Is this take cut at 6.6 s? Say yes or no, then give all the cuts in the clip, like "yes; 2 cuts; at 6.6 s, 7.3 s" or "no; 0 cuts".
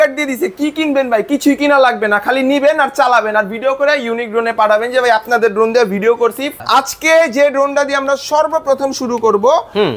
yes; 1 cut; at 6.6 s